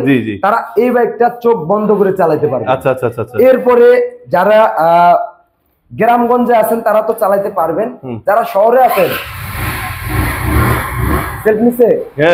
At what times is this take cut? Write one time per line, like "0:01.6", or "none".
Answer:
none